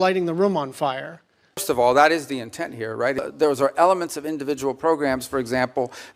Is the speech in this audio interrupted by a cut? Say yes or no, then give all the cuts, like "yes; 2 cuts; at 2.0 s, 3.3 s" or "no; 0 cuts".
yes; 2 cuts; at 1.6 s, 3.2 s